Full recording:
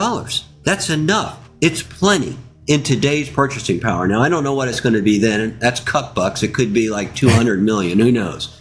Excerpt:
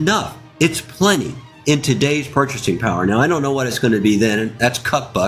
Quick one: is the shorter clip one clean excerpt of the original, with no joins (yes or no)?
yes